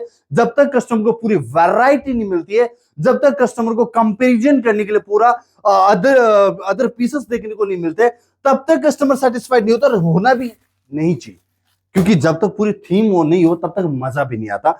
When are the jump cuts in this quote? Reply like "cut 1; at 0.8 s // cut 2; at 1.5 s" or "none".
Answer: none